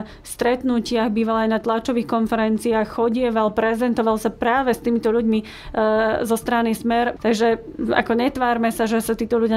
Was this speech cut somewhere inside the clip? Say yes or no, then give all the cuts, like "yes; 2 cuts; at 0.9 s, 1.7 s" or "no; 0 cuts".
yes; 1 cut; at 7.1 s